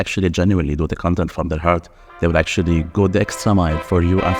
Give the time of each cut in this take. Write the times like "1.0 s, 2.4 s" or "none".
none